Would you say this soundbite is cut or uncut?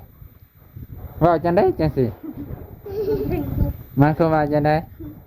uncut